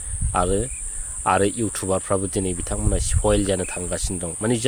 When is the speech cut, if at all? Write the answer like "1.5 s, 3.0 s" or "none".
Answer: none